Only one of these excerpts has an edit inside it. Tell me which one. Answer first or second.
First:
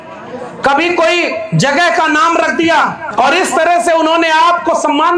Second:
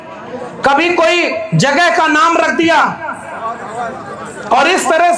first